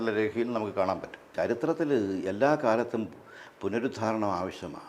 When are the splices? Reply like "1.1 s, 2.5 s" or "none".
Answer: 1.3 s

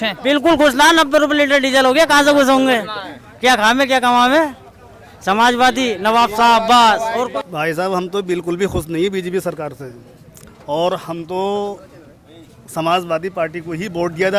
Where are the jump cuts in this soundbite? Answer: 7.4 s

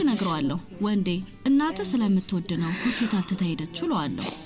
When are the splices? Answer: none

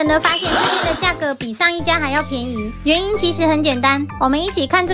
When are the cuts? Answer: none

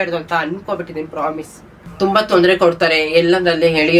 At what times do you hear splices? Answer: 1.8 s

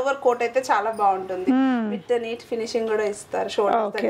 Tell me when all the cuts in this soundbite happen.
none

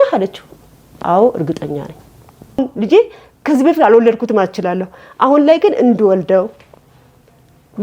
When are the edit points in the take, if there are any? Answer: 2.6 s

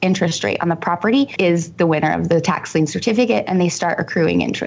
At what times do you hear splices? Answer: 1.3 s

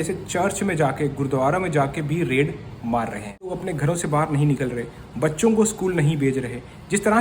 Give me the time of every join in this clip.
3.6 s

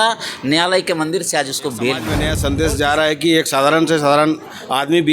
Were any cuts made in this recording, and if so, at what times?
2.1 s

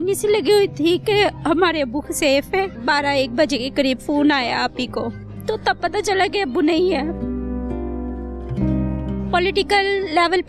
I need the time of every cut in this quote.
2.7 s, 5.3 s, 7.2 s, 9.0 s

